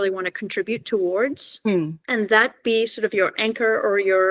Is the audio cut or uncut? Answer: cut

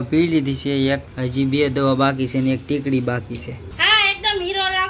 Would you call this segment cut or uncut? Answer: cut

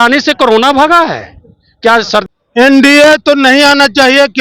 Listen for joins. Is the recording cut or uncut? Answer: cut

